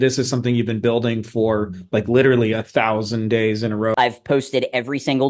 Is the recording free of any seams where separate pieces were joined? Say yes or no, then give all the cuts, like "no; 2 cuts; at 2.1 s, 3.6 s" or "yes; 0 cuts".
no; 1 cut; at 3.9 s